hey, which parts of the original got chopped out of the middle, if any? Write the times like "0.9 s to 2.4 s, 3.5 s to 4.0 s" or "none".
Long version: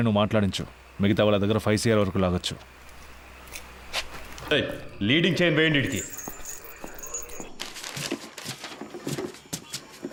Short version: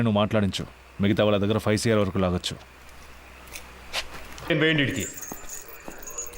4.5 s to 5.5 s